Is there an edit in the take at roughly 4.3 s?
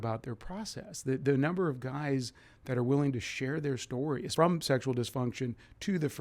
yes; 1 cut; at 4.3 s

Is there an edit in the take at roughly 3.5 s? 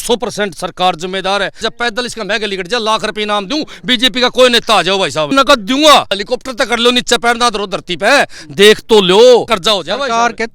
no; 4 cuts; at 1.6 s, 5.3 s, 6.2 s, 9.5 s

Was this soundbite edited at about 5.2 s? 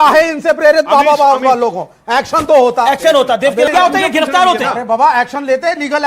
yes; 2 cuts; at 3.6 s, 5.2 s

